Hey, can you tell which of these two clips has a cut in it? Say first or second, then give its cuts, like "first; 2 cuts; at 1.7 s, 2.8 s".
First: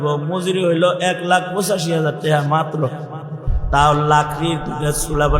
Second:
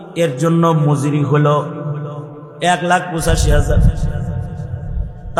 first; 1 cut; at 3.5 s